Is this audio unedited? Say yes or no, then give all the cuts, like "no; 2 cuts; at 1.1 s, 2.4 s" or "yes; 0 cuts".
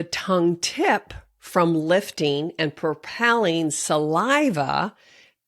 yes; 0 cuts